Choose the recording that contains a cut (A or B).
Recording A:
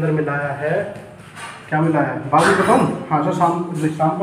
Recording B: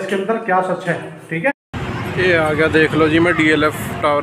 B